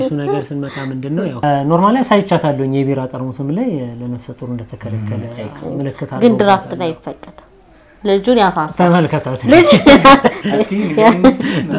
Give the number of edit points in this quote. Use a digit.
1